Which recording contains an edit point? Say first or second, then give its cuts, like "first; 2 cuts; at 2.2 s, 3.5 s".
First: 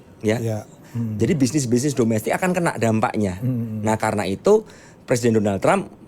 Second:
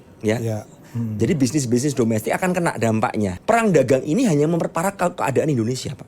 second; 1 cut; at 3.4 s